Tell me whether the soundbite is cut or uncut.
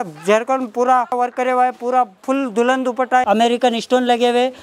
cut